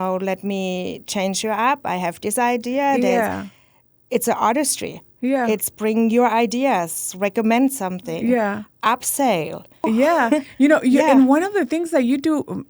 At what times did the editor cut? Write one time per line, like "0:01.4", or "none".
0:09.8